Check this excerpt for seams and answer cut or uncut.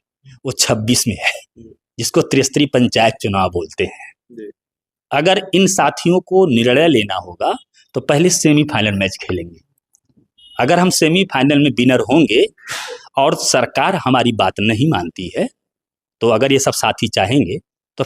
uncut